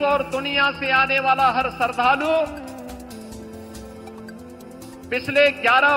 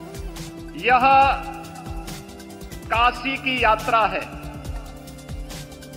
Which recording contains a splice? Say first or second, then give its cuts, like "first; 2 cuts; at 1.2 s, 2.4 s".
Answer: second; 2 cuts; at 0.8 s, 4.9 s